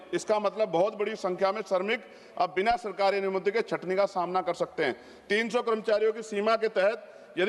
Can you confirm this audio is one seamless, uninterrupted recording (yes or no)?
yes